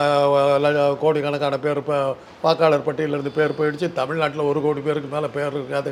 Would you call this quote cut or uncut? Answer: uncut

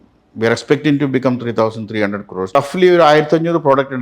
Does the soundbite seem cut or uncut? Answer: cut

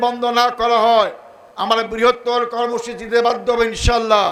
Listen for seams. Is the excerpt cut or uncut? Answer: uncut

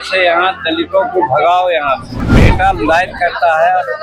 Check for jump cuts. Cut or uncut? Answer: cut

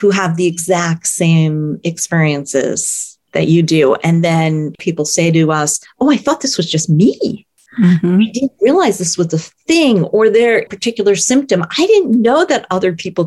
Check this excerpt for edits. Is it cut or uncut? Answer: cut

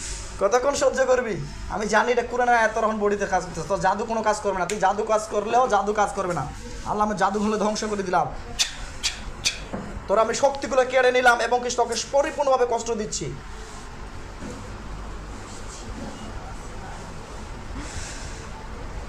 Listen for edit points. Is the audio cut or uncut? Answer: uncut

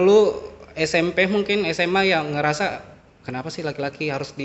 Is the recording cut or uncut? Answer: uncut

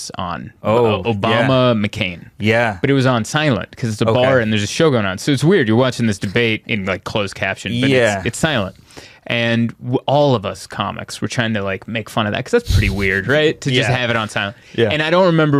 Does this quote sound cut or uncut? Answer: uncut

